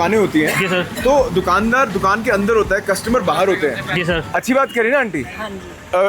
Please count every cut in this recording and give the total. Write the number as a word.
one